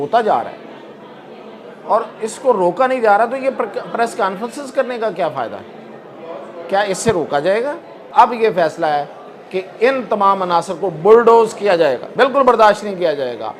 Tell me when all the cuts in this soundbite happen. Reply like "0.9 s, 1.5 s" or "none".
8.1 s, 12.0 s